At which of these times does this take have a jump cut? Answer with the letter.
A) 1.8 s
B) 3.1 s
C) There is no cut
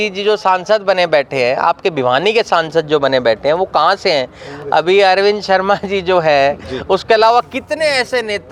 C